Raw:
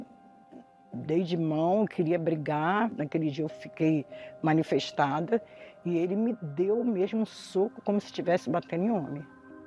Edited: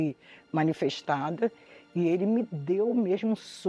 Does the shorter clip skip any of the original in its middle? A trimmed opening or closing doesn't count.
no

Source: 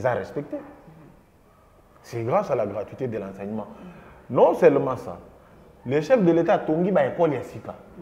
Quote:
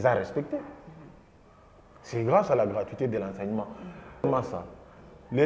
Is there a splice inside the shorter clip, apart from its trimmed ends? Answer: yes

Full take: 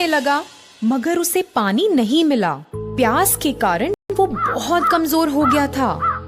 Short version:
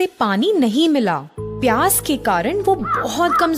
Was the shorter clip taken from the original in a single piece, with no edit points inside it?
no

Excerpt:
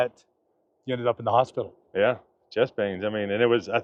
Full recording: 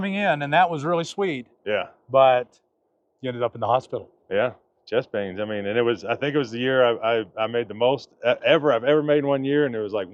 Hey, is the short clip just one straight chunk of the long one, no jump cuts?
yes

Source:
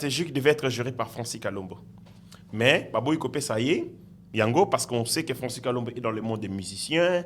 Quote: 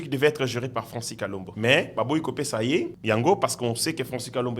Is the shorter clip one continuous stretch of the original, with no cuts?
no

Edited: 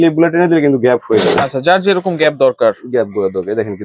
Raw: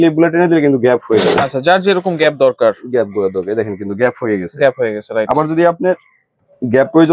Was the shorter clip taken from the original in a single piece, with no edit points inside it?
yes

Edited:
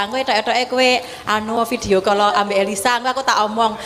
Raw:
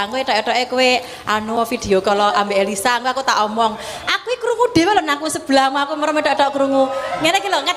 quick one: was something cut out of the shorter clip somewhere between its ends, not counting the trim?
no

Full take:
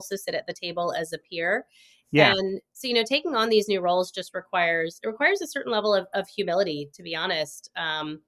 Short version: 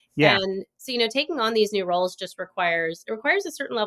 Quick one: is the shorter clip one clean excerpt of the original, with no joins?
yes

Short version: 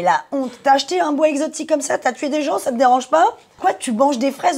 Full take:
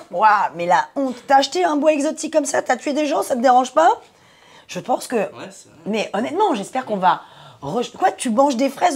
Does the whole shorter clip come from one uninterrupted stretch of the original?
no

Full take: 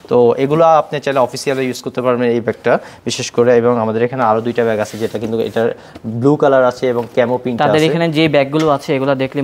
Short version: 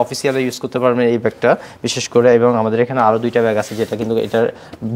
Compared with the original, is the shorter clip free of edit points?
yes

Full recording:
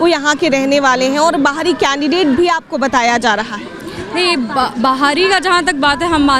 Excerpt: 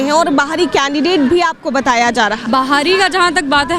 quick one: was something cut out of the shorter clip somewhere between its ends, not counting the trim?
yes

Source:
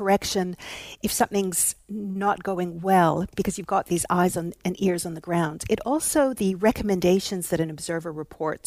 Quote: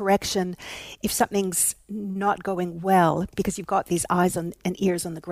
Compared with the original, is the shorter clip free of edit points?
yes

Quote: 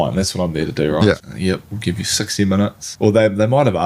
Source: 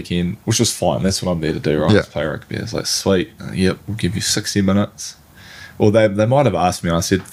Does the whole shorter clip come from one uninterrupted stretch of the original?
no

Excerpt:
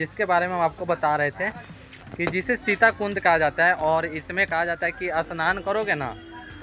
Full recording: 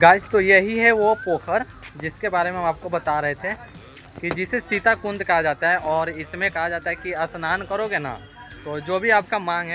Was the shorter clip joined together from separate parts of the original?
no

